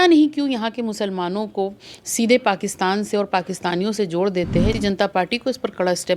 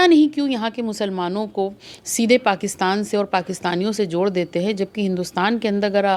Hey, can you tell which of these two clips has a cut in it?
first; 1 cut; at 4.8 s

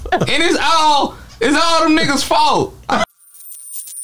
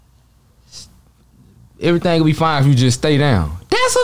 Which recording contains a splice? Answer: first; 1 cut; at 3.1 s

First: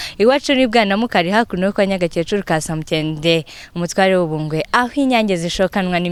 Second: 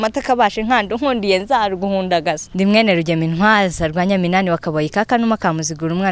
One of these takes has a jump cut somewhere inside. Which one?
second; 1 cut; at 2.5 s

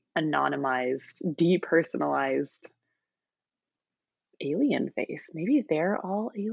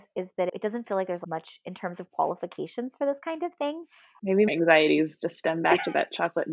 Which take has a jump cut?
second; 2 cuts; at 1.2 s, 4.5 s

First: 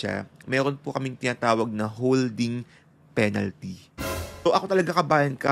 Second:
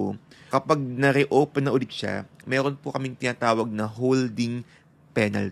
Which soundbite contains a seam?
first; 1 cut; at 4.5 s

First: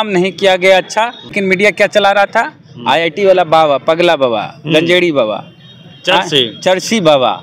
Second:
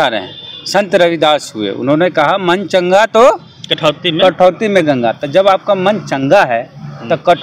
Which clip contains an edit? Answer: first; 1 cut; at 1.3 s

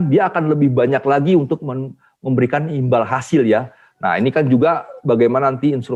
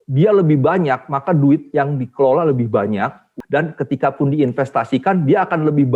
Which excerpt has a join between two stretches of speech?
second; 1 cut; at 3.3 s

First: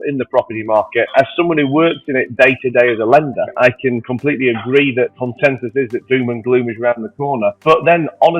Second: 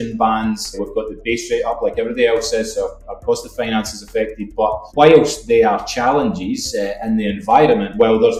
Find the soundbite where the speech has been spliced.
first; 3 cuts; at 1.1 s, 3.5 s, 5.2 s

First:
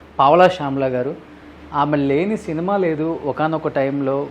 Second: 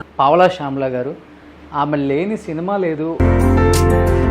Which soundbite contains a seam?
second; 1 cut; at 3.1 s

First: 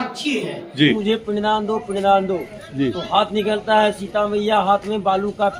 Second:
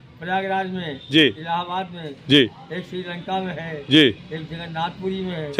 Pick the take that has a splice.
first; 1 cut; at 1.0 s

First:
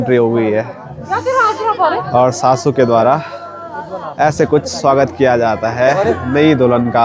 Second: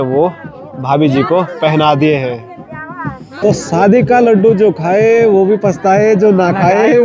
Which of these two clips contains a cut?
second; 1 cut; at 3.4 s

